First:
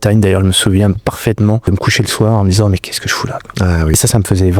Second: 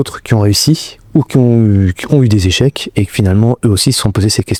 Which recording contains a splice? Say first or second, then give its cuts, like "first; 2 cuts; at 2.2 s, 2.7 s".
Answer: first; 2 cuts; at 1.7 s, 3.9 s